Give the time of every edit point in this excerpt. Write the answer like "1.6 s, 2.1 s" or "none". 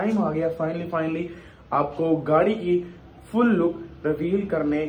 none